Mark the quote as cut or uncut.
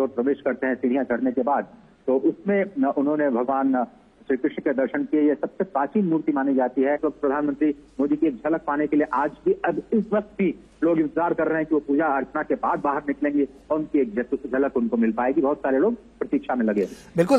cut